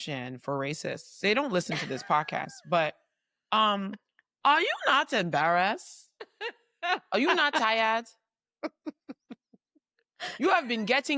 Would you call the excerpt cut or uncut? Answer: uncut